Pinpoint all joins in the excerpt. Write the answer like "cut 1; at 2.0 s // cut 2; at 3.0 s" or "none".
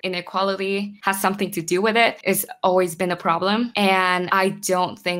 cut 1; at 2.2 s